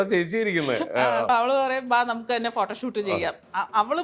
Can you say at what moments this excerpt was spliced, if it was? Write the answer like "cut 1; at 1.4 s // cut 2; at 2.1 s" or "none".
cut 1; at 1.3 s